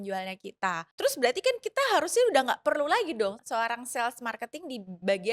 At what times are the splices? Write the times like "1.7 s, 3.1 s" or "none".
0.9 s, 3.4 s

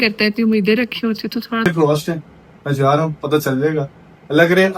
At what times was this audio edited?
1.7 s

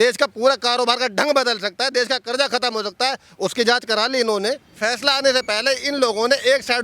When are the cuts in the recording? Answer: 4.7 s

